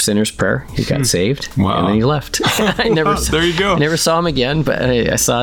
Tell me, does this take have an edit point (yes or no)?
no